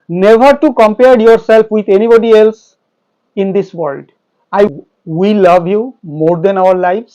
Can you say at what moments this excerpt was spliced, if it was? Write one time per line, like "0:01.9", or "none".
0:04.7